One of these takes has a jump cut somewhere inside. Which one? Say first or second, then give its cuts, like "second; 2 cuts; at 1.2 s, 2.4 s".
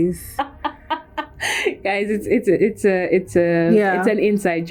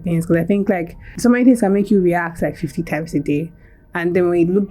second; 1 cut; at 1.0 s